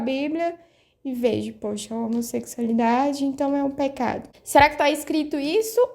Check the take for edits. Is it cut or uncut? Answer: cut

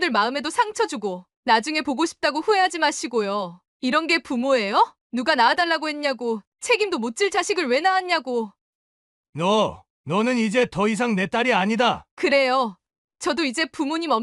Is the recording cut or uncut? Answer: cut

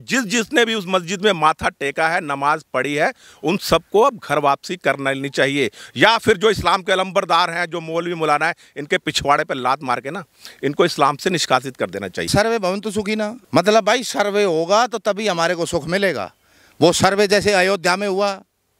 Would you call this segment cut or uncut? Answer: cut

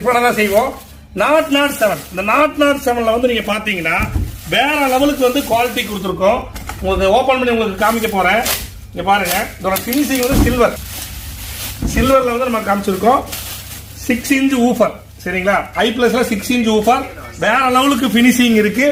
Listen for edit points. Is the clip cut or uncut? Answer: uncut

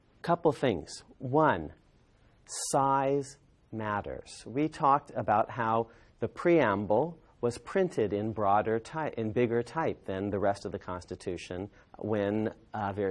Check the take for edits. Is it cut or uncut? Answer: uncut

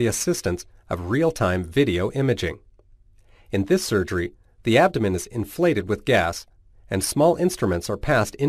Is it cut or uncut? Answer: uncut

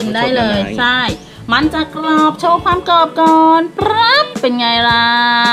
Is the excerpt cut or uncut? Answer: uncut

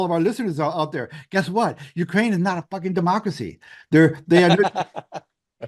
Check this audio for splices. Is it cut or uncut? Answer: uncut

